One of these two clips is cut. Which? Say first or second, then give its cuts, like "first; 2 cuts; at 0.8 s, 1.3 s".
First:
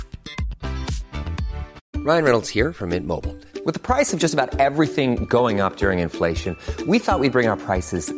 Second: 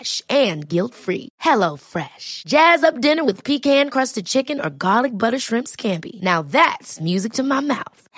first; 1 cut; at 1.8 s